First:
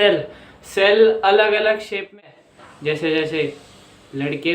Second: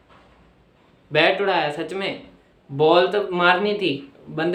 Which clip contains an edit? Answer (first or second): first